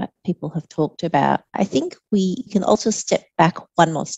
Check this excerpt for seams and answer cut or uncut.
cut